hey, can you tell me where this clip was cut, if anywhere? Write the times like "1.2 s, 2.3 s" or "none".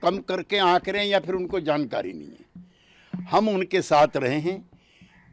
none